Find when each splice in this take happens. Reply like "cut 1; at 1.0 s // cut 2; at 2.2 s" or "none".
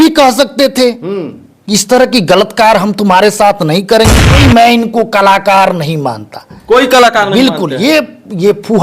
cut 1; at 4.4 s